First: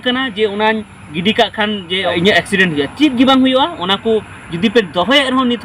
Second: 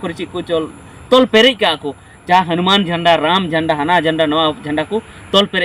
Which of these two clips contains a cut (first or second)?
first